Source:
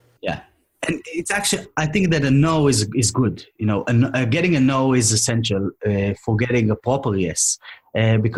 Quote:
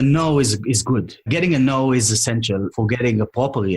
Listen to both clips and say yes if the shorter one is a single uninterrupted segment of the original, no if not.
no